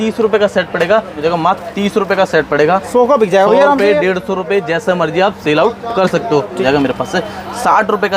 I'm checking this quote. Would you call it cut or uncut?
cut